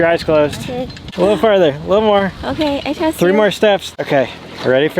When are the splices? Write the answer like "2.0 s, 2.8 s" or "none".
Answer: 1.0 s, 3.9 s